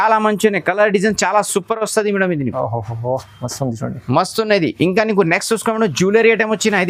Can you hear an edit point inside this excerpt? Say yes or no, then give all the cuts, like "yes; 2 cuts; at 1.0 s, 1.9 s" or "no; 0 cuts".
no; 0 cuts